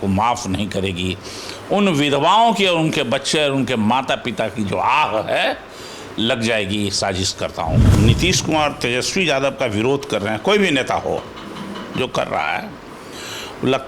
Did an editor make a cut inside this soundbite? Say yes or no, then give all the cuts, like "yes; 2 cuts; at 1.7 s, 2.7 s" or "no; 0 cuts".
yes; 1 cut; at 7.9 s